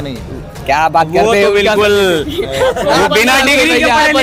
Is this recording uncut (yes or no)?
yes